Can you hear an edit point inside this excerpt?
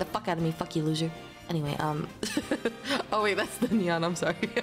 no; 0 cuts

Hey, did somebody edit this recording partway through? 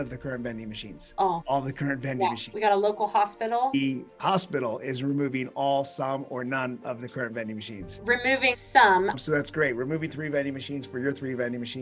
yes; 3 cuts; at 2.5 s, 3.7 s, 9.1 s

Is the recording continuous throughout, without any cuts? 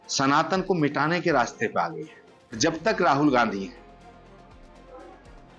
no; 1 cut; at 2.6 s

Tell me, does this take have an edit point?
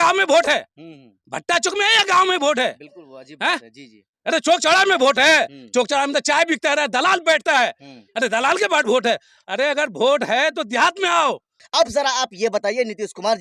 yes; 1 cut; at 11.5 s

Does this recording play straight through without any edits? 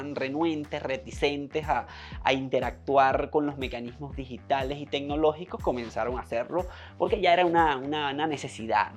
yes; 0 cuts

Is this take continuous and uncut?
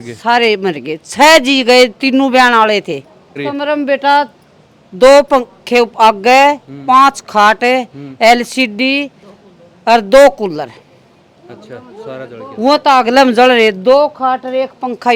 no; 1 cut; at 3.4 s

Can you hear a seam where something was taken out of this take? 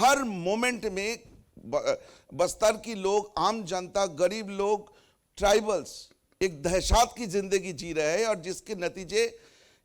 no; 0 cuts

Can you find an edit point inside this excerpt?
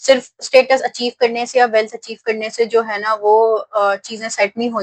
no; 0 cuts

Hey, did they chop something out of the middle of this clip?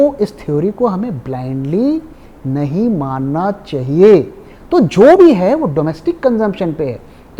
no; 0 cuts

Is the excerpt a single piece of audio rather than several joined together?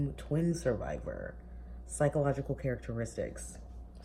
yes; 0 cuts

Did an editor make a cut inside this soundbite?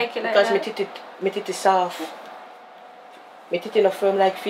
no; 0 cuts

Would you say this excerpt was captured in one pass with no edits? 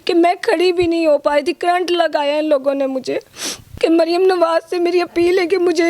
no; 1 cut; at 3.6 s

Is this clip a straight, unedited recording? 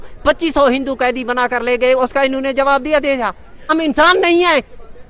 no; 1 cut; at 3.7 s

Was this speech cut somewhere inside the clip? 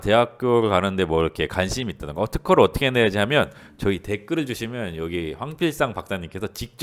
no; 0 cuts

